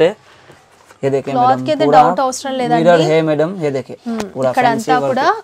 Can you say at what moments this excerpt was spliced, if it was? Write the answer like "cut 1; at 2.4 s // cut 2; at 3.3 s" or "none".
none